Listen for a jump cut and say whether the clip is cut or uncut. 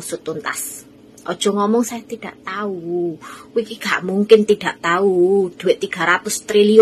uncut